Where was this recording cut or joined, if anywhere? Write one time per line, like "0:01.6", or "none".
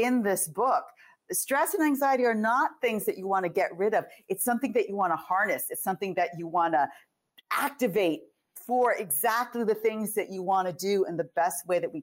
none